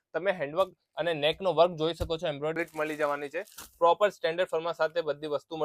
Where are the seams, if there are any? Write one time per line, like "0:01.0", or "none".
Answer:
0:02.5